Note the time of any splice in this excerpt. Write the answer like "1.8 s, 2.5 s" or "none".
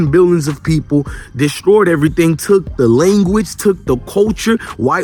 none